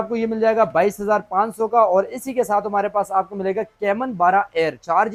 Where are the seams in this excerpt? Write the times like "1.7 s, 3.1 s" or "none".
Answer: none

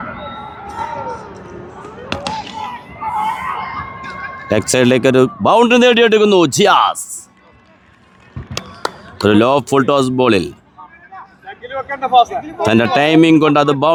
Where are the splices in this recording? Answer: none

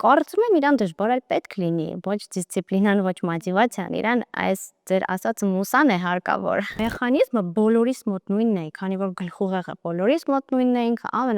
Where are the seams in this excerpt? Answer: 6.8 s

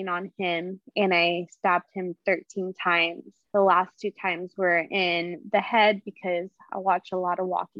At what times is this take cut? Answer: 3.3 s

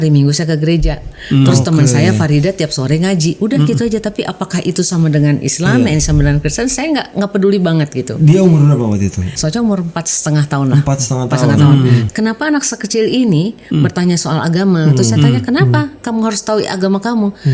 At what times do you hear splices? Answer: 9.3 s, 12.0 s

